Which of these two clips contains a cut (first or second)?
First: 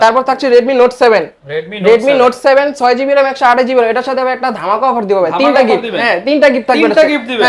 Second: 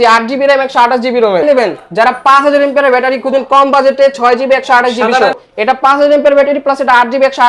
second